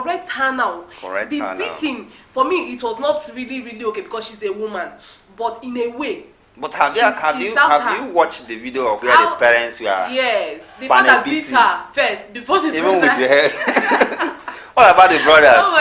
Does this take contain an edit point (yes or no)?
no